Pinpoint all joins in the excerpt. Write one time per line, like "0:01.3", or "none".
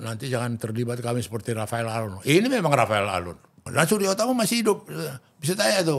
0:03.6